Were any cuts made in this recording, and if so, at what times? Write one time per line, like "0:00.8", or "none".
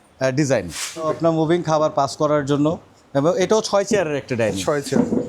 0:01.0